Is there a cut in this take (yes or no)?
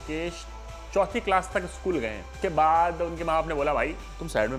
no